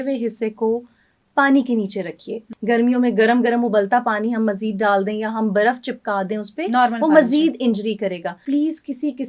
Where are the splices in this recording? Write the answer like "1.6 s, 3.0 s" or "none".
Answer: 2.4 s, 8.4 s